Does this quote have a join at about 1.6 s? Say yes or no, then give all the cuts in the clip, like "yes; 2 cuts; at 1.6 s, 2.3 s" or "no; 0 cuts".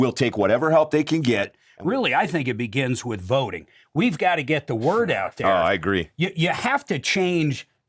yes; 1 cut; at 1.6 s